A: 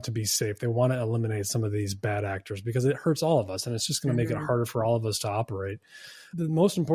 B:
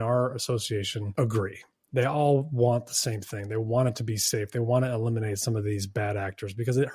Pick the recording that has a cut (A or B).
B